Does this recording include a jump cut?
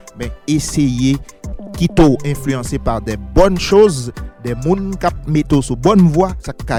no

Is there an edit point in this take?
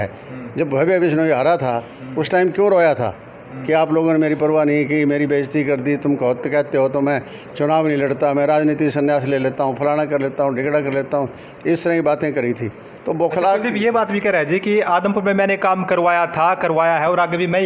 no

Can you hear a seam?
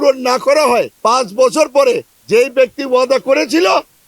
yes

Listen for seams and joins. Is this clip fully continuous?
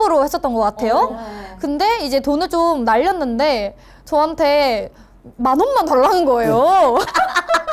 yes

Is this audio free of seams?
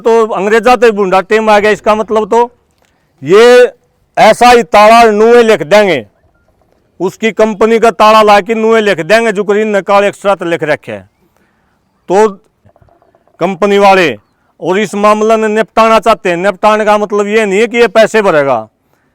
no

